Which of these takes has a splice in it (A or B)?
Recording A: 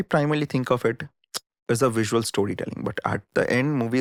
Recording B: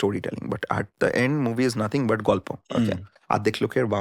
B